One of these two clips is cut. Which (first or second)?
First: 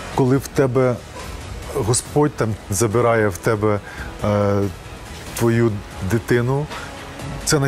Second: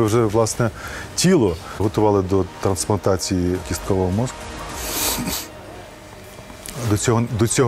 second